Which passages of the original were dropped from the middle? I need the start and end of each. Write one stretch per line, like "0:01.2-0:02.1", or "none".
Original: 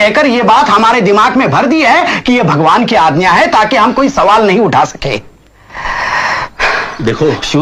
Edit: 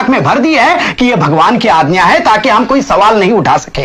none